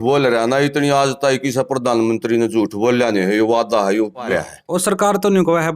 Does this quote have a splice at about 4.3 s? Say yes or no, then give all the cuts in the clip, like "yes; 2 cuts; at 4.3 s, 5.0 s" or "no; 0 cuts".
yes; 1 cut; at 4.3 s